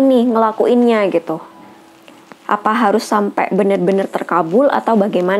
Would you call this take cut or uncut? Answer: uncut